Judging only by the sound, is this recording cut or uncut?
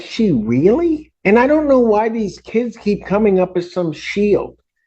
cut